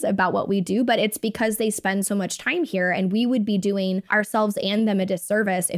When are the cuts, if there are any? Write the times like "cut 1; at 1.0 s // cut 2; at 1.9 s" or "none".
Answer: cut 1; at 4.0 s